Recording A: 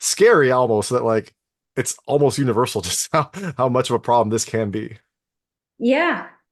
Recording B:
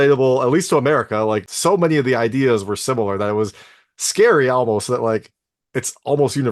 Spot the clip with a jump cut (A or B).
B